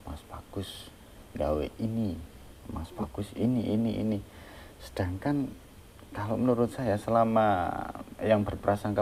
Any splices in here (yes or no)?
no